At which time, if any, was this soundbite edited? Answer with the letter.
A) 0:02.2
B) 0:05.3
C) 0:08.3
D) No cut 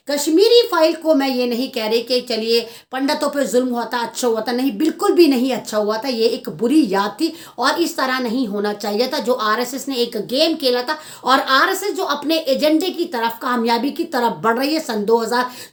D